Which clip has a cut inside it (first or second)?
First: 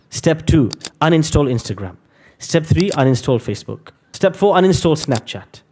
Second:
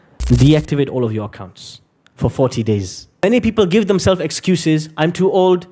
second